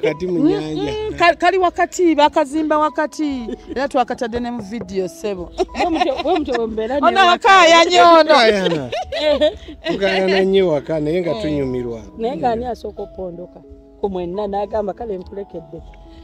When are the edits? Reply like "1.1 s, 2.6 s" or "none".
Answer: none